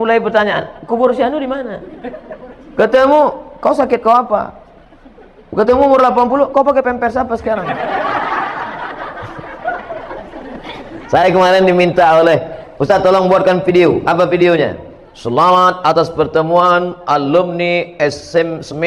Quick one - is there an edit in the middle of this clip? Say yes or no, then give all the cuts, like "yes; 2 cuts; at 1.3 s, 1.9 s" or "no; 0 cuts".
no; 0 cuts